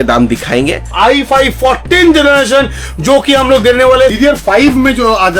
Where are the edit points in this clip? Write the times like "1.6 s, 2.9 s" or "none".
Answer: 0.9 s, 4.1 s